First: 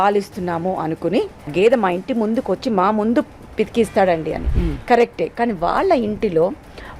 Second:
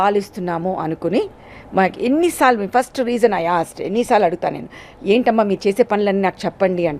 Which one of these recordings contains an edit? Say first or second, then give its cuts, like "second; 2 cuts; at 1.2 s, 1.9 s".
first; 1 cut; at 1.5 s